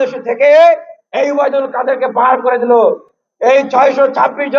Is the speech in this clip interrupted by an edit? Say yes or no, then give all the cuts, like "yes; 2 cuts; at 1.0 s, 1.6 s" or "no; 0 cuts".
no; 0 cuts